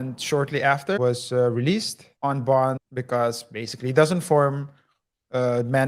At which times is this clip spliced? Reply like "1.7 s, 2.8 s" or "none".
1.0 s, 2.0 s, 2.9 s